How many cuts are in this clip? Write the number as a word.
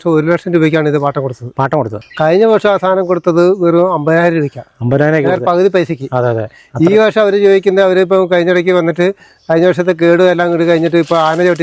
one